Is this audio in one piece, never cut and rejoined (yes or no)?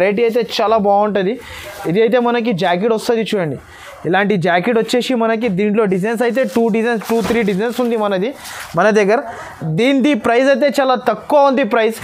yes